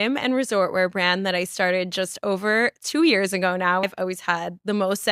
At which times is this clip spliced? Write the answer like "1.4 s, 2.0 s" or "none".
3.8 s